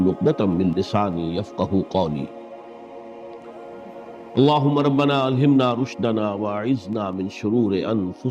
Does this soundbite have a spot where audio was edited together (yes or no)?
yes